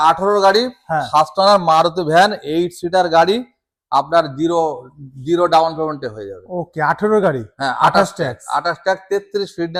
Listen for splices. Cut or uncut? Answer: uncut